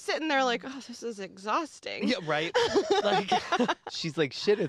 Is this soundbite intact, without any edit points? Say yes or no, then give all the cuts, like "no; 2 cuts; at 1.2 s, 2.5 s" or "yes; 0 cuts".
yes; 0 cuts